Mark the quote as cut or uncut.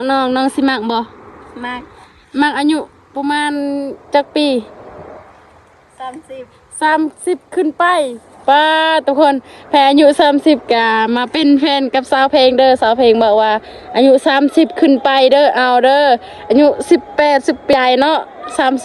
cut